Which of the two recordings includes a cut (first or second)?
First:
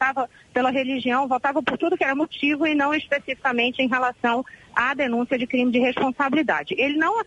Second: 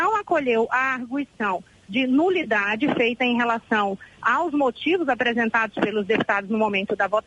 second